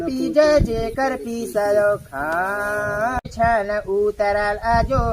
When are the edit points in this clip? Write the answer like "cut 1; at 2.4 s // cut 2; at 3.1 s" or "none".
cut 1; at 3.2 s